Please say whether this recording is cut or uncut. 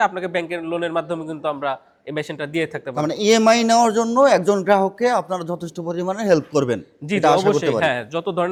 uncut